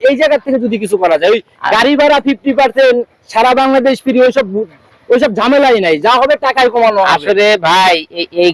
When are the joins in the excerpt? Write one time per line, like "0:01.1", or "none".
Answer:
none

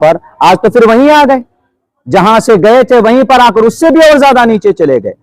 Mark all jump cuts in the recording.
none

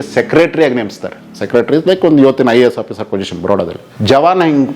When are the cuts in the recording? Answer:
0:03.8

